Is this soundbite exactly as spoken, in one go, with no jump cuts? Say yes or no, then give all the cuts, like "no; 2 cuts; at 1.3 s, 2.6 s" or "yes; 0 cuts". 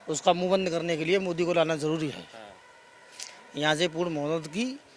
yes; 0 cuts